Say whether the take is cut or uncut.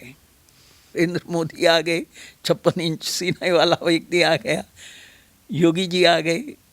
cut